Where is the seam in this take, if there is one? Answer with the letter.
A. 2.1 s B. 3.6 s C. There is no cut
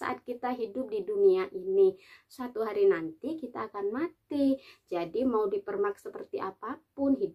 C